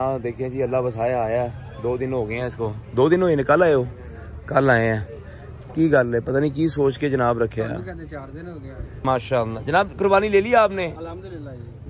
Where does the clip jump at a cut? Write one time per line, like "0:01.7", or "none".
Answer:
0:09.0